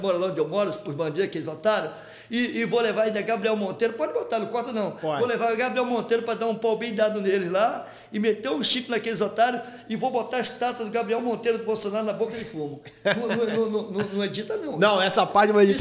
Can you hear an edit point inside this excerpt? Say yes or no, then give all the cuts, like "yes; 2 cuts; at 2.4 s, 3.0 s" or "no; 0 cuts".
no; 0 cuts